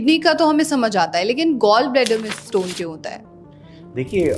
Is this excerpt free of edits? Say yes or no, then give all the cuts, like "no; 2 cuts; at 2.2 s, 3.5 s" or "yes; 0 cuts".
yes; 0 cuts